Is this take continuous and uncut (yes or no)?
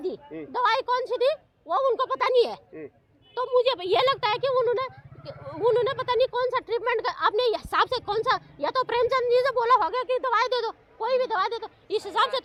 yes